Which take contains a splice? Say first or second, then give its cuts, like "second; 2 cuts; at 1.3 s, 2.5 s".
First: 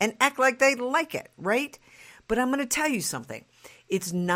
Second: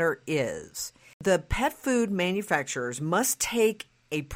second; 1 cut; at 1.2 s